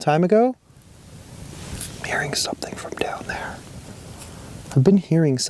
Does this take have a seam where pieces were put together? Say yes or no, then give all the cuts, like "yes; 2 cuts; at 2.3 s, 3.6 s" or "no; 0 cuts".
yes; 1 cut; at 1.0 s